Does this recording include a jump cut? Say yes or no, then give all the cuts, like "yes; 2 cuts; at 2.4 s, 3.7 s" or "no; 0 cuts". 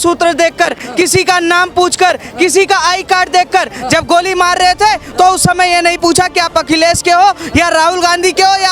no; 0 cuts